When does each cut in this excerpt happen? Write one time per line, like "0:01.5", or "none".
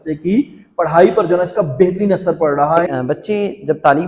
0:02.9